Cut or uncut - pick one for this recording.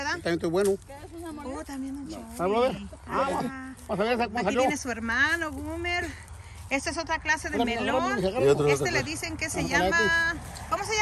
uncut